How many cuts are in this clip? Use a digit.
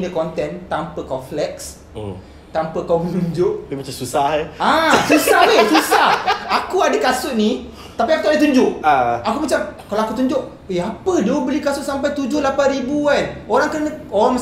0